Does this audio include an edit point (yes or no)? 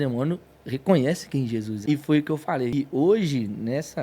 yes